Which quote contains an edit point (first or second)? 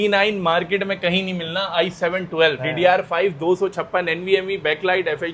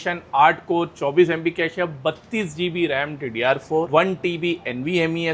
first